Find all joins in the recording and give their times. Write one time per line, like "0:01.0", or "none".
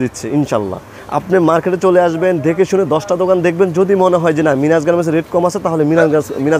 none